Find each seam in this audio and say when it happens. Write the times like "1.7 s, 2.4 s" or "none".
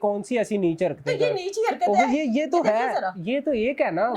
none